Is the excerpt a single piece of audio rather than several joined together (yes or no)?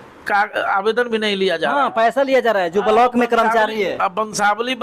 yes